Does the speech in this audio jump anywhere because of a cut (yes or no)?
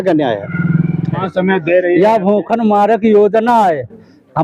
yes